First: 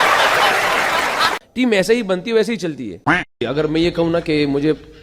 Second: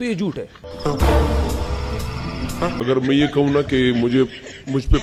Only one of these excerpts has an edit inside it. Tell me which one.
first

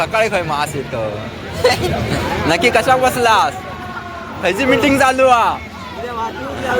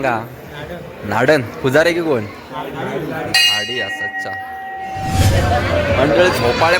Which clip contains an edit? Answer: second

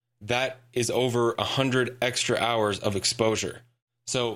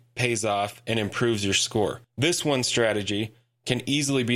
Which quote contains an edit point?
second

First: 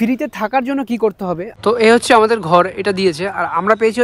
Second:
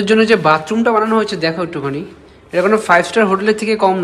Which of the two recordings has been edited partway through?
first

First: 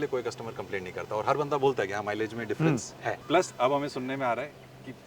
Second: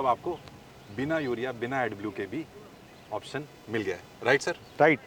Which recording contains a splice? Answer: first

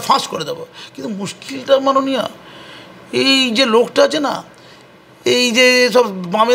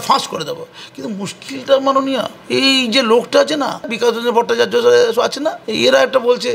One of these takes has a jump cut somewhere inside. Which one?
second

